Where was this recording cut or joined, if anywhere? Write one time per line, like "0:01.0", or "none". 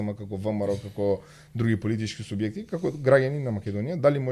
none